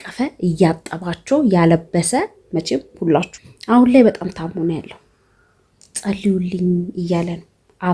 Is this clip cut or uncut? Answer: cut